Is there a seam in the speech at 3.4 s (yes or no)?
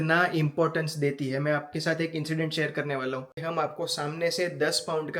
yes